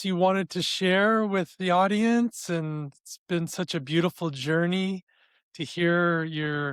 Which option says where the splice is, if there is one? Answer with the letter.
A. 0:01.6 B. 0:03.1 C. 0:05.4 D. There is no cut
D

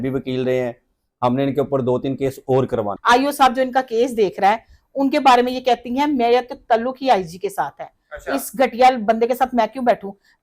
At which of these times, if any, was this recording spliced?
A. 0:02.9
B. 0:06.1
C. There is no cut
A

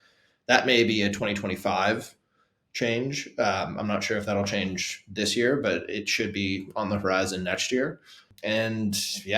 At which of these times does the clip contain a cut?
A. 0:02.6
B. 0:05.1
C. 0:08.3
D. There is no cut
C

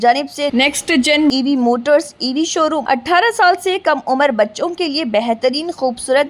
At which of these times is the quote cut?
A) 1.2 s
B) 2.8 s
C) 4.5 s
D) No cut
B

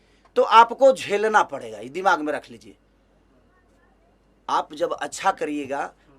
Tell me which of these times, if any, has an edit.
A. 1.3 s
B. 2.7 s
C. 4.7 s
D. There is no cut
D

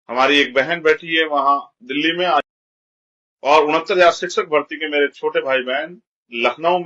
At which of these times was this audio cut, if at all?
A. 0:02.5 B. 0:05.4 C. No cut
A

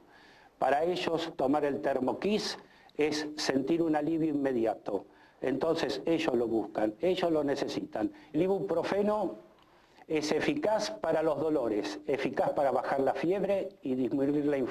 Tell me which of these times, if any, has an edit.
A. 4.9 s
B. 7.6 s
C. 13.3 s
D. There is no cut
B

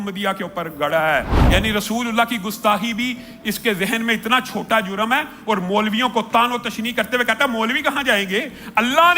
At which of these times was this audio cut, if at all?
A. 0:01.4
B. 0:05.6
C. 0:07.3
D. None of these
A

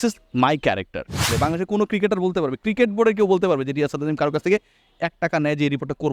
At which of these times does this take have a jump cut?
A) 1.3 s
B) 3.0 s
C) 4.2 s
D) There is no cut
A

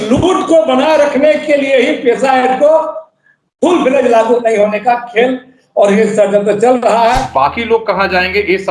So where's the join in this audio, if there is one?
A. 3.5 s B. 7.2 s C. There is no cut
B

